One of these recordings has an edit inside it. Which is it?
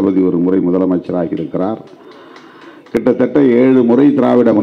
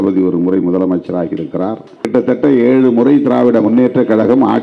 second; 1 cut; at 2.0 s

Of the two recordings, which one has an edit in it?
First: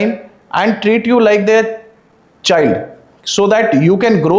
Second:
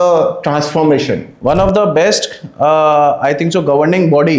second; 1 cut; at 1.3 s

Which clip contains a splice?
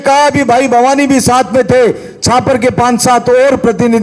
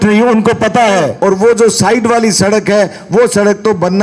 second; 1 cut; at 1.1 s

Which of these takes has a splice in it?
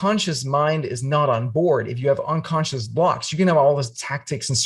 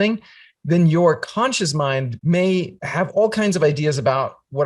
second; 2 cuts; at 2.1 s, 2.8 s

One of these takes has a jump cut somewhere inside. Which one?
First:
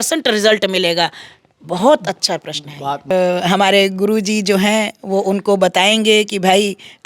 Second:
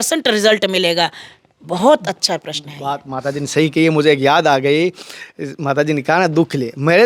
first; 1 cut; at 3.1 s

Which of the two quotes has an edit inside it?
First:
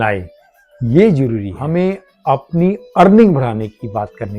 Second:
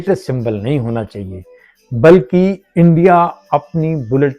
first; 1 cut; at 1.5 s

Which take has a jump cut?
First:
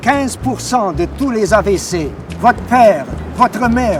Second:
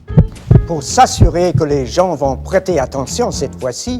second; 1 cut; at 1.9 s

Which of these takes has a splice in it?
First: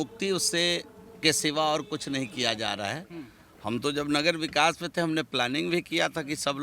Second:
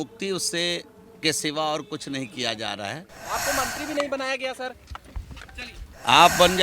second; 1 cut; at 3.1 s

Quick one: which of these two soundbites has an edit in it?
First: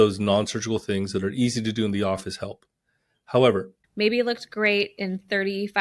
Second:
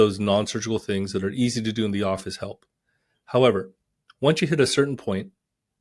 first; 1 cut; at 3.8 s

